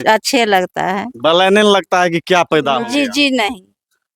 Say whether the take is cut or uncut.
uncut